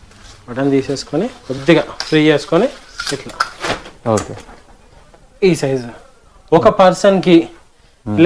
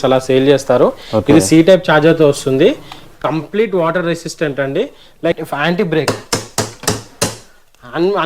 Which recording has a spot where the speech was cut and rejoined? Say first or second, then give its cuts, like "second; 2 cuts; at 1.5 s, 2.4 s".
second; 1 cut; at 5.4 s